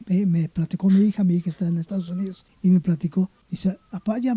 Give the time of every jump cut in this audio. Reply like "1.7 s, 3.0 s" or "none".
2.4 s, 3.4 s